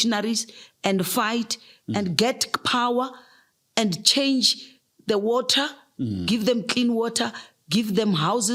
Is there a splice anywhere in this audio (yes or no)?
no